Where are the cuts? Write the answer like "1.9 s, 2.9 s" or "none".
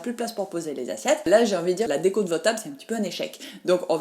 1.3 s